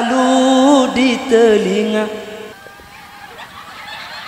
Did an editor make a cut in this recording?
yes; 1 cut; at 2.5 s

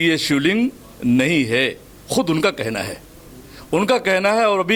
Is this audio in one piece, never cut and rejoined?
yes; 0 cuts

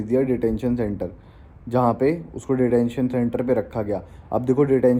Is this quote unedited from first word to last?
yes; 0 cuts

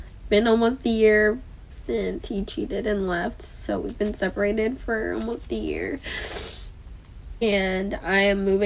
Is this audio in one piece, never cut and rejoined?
yes; 0 cuts

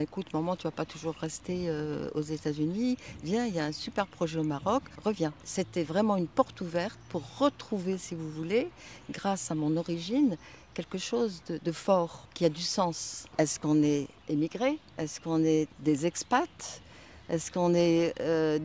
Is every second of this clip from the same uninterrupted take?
no; 6 cuts; at 5.1 s, 12.2 s, 13.2 s, 14.2 s, 14.9 s, 15.7 s

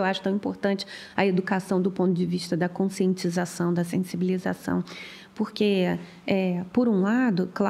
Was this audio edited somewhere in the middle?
no; 0 cuts

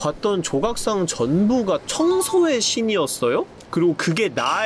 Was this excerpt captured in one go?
yes; 0 cuts

